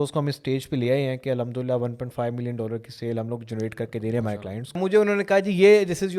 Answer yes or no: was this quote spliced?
yes